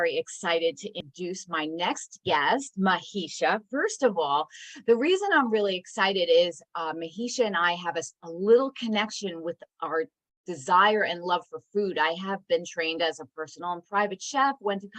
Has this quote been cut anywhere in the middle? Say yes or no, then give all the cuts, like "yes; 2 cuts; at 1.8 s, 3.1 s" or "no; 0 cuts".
yes; 1 cut; at 1.0 s